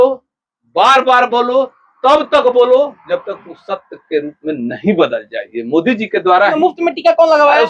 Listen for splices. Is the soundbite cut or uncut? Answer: cut